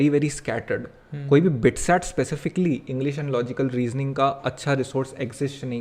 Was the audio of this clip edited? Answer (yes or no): no